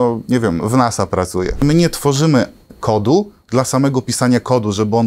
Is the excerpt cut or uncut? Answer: cut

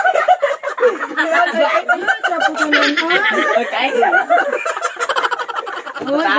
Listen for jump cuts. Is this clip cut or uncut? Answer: uncut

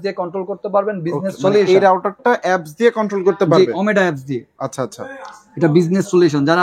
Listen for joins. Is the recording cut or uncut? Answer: uncut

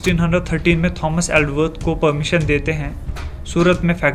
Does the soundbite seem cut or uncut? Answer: uncut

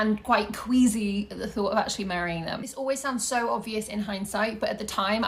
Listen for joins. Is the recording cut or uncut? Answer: uncut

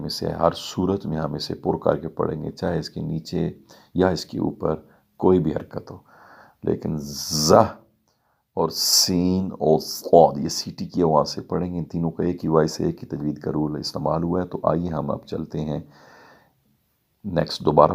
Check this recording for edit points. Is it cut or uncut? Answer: uncut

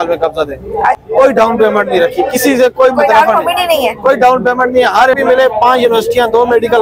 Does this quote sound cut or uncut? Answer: cut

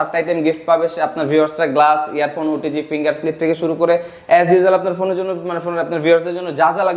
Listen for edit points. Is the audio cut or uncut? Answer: uncut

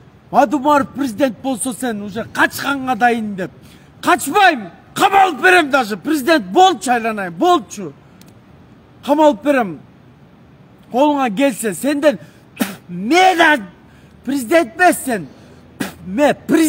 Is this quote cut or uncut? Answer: uncut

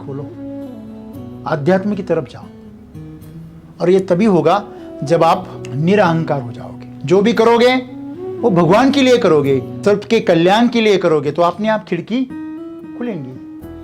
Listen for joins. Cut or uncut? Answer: cut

